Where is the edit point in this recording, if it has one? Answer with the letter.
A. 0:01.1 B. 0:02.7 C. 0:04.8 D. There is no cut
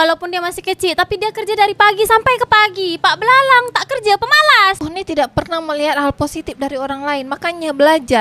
C